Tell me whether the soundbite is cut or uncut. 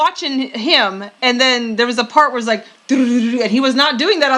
uncut